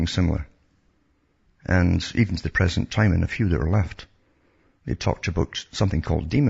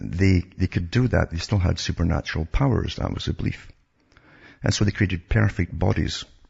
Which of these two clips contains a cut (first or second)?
first